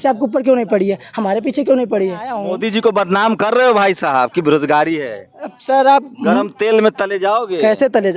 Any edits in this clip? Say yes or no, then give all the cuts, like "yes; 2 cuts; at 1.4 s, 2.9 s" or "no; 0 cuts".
yes; 1 cut; at 2.5 s